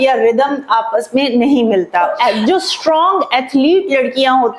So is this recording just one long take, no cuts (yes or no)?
no